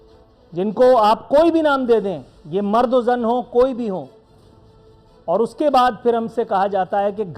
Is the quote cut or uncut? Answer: uncut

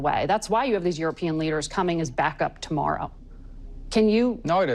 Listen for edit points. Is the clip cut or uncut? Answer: uncut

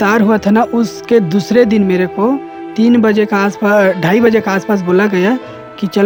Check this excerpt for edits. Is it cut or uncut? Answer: uncut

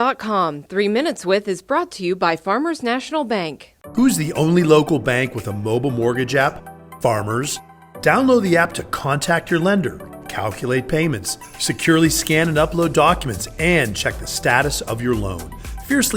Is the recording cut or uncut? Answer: uncut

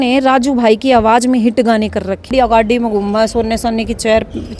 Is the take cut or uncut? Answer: cut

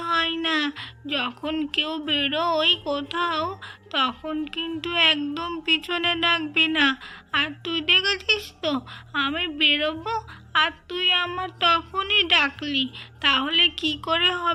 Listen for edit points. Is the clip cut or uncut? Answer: uncut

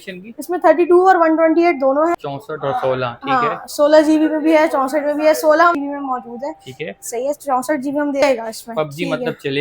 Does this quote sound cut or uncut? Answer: cut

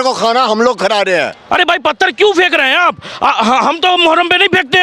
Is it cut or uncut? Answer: cut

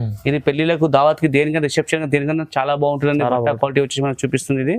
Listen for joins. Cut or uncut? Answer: uncut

